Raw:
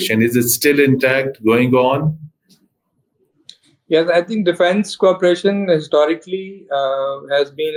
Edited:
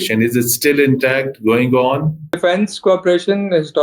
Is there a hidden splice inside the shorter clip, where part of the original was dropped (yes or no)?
yes